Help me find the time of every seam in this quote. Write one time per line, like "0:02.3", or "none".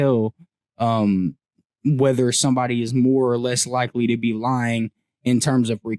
none

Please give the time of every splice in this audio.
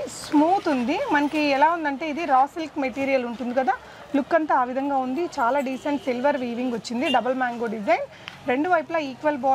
none

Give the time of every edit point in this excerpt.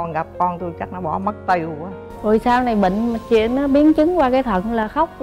0:02.0

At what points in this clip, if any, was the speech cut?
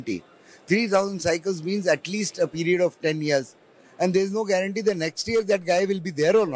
none

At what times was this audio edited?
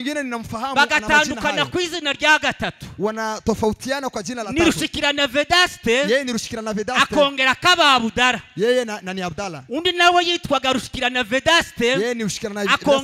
none

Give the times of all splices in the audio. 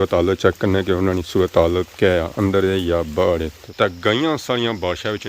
0:03.6

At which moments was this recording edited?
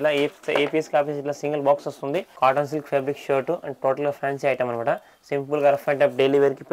0:02.3

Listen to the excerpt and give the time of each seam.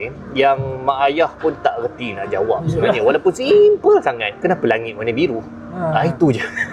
0:04.3

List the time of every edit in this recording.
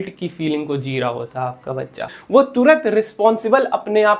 0:02.1

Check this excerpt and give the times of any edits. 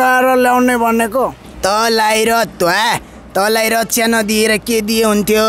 0:01.5

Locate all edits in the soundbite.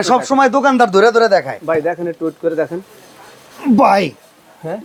none

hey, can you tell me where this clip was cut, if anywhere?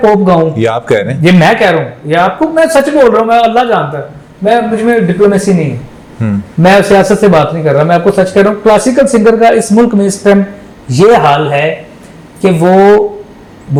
none

